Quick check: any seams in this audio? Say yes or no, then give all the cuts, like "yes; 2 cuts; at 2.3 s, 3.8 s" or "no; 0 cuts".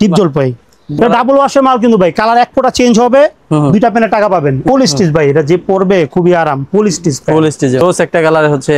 yes; 3 cuts; at 1.0 s, 4.6 s, 7.8 s